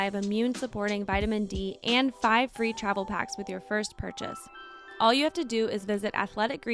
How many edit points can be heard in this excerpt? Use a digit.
0